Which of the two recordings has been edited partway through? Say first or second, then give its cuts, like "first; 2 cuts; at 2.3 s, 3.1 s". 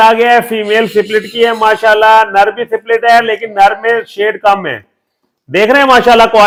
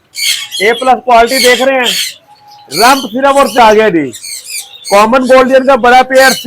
second; 1 cut; at 3.6 s